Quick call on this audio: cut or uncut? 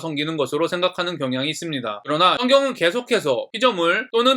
cut